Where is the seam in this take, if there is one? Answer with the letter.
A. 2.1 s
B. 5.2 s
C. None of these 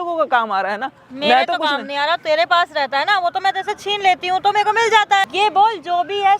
B